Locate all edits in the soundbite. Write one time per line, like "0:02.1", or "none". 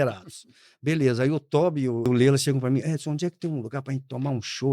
0:02.1